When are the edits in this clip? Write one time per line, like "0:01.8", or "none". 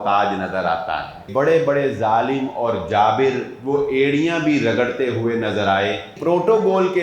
0:01.2
0:06.2